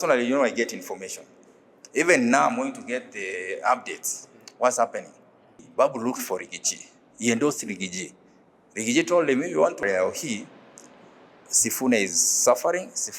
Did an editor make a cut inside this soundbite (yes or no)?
yes